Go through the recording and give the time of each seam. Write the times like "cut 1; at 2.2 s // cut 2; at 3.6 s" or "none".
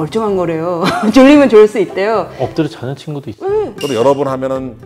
cut 1; at 3.7 s